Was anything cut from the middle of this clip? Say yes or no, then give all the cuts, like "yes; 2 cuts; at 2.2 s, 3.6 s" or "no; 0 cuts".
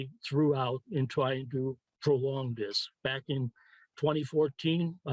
no; 0 cuts